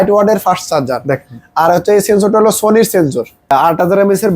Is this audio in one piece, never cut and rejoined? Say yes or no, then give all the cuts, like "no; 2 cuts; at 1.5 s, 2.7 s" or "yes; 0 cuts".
no; 1 cut; at 3.4 s